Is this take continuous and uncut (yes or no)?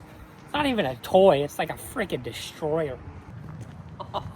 no